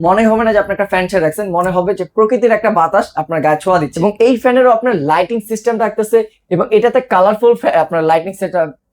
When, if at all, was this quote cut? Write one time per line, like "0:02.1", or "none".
0:03.9